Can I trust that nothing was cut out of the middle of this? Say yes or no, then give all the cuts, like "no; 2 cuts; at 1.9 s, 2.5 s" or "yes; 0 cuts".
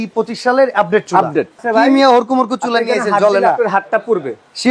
no; 1 cut; at 1.6 s